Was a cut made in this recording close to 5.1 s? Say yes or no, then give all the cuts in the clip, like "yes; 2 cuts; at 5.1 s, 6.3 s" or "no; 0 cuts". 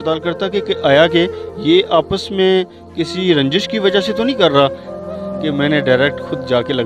yes; 1 cut; at 5.1 s